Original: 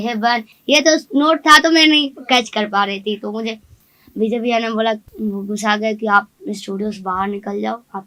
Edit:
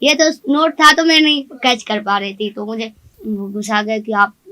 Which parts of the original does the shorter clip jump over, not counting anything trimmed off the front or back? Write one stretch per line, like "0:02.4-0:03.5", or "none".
0:03.8-0:05.1